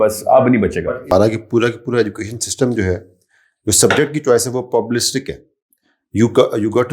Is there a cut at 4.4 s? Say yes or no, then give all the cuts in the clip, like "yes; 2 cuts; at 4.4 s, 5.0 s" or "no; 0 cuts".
no; 1 cut; at 1.1 s